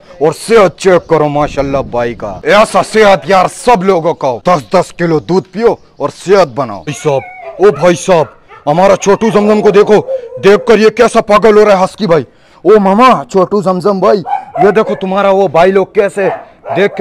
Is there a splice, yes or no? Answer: yes